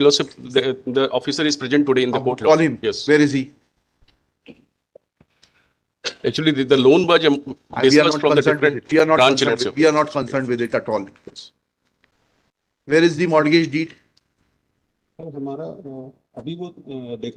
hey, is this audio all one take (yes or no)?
yes